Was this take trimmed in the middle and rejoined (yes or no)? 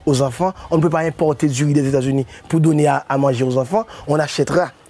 yes